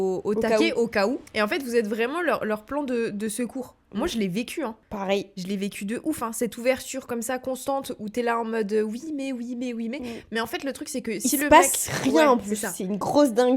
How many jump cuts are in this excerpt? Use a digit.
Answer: 2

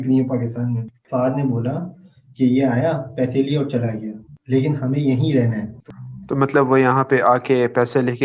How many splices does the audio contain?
2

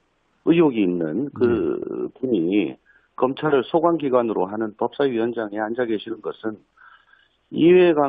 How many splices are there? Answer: 1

